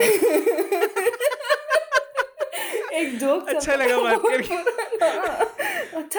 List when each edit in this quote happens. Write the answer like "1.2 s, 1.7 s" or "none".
none